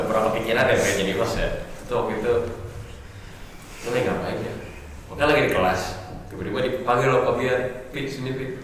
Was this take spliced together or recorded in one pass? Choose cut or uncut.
uncut